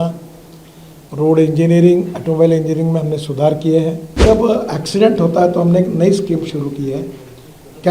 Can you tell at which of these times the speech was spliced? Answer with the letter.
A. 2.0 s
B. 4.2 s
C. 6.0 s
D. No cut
B